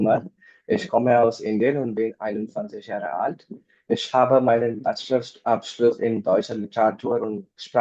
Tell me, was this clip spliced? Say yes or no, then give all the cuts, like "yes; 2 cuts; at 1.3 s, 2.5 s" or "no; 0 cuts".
no; 0 cuts